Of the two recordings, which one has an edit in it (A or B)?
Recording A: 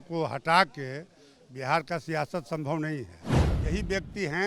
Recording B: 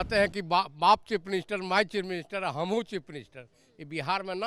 A